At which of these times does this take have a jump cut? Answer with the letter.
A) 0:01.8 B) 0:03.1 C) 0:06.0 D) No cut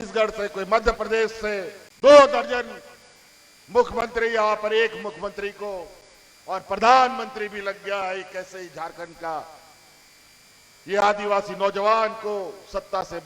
A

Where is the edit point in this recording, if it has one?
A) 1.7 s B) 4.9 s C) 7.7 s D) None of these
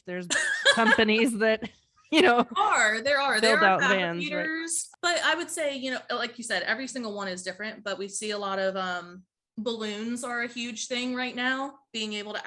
B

